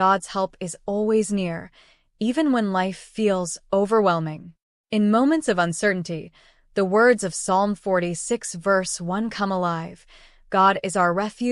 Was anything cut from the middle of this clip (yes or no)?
no